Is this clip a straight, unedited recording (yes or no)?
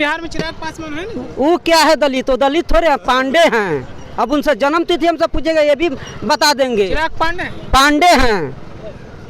yes